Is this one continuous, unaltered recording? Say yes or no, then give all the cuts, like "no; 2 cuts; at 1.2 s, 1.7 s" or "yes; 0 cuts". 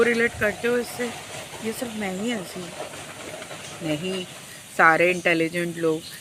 yes; 0 cuts